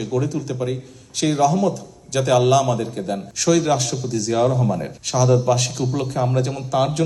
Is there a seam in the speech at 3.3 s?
yes; 1 cut; at 3.3 s

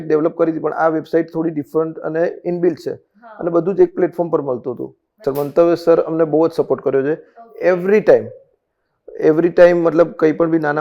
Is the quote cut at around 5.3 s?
yes; 1 cut; at 5.3 s

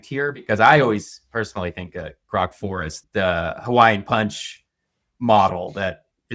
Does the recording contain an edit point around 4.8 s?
no; 1 cut; at 3.0 s

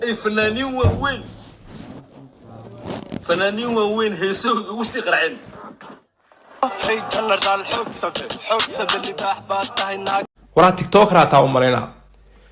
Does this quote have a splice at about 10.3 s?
yes; 1 cut; at 10.3 s

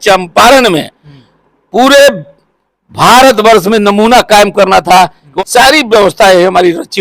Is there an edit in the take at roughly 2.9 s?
no; 1 cut; at 5.3 s

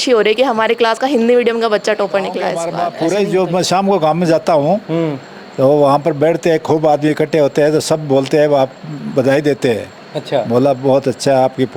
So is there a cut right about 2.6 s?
yes; 1 cut; at 2.6 s

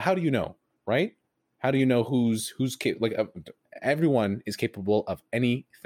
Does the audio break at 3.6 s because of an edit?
yes; 1 cut; at 3.6 s

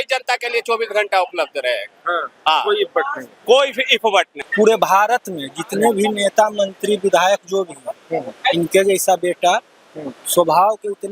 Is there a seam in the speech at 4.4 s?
yes; 1 cut; at 4.4 s

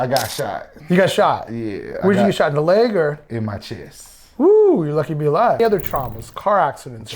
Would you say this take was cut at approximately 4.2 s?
no; 1 cut; at 5.6 s

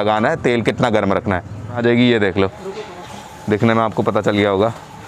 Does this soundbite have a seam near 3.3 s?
no; 1 cut; at 1.8 s

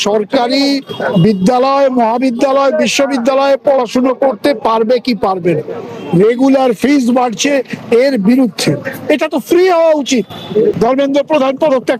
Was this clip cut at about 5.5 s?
no; 1 cut; at 10.8 s

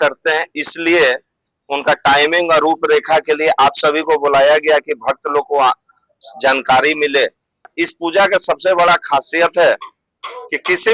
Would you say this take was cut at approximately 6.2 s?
no; 1 cut; at 7.7 s

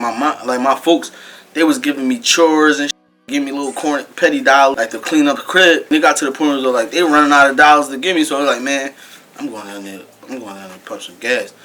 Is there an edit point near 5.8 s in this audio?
yes; 2 cuts; at 4.8 s, 5.8 s

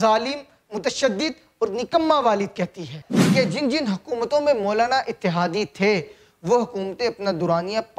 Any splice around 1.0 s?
no; 1 cut; at 3.0 s

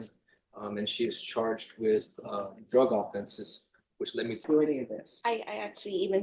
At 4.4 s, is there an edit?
yes; 1 cut; at 4.4 s

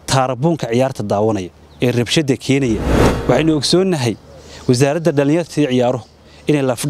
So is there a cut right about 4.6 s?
no; 1 cut; at 2.9 s

